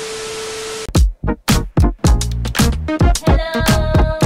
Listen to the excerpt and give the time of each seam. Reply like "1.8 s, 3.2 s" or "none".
none